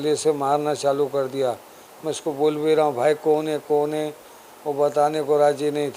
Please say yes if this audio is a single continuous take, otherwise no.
yes